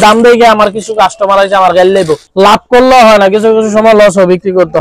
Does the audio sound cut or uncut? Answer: cut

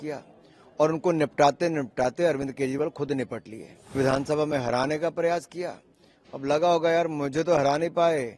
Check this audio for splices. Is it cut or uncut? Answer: cut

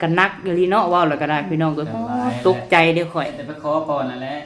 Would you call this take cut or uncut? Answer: cut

